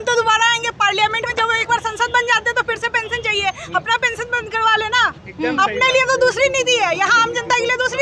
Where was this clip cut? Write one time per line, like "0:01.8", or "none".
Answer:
none